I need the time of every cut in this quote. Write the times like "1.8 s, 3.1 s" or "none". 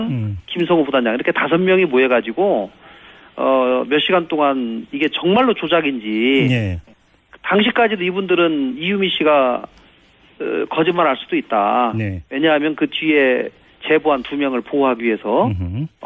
12.4 s